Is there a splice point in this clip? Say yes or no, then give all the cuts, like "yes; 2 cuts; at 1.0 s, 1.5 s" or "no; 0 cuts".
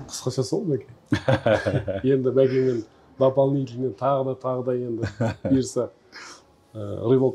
no; 0 cuts